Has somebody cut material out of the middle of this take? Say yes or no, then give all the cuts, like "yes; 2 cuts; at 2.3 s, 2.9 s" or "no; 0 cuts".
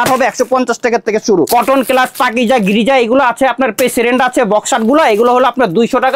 yes; 1 cut; at 1.5 s